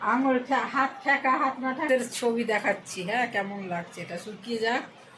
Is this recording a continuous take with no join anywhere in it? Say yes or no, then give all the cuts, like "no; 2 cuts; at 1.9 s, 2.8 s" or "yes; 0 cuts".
no; 1 cut; at 1.9 s